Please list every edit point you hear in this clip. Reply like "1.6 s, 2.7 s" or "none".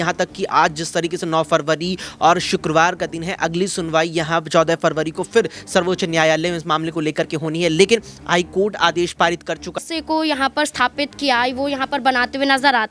9.8 s

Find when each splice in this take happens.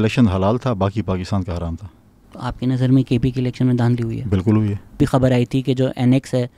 5.0 s

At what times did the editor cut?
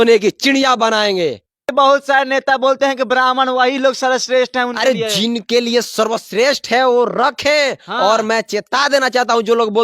1.7 s

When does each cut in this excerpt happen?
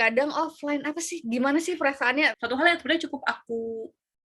2.3 s

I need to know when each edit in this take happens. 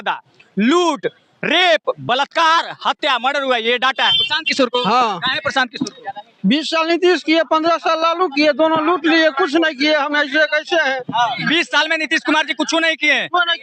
4.2 s, 11.4 s

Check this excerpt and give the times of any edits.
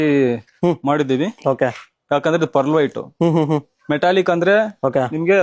none

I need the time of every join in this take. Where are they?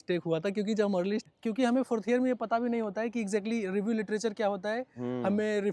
1.2 s

